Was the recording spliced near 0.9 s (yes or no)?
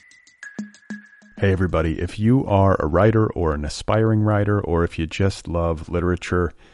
yes